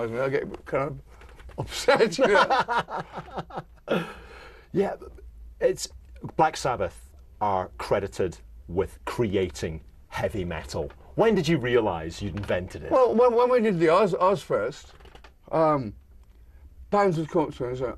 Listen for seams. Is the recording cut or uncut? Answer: uncut